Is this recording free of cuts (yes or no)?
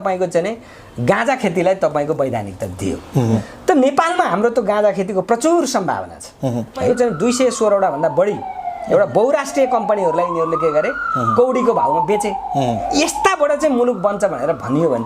no